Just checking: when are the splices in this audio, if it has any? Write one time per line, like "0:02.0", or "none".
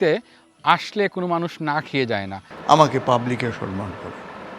0:02.5